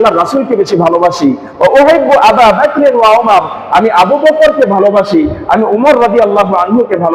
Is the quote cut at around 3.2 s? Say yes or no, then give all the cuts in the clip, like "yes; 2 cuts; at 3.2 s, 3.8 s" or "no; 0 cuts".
no; 0 cuts